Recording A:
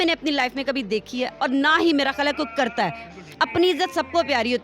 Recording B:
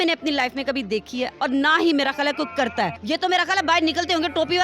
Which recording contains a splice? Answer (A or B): B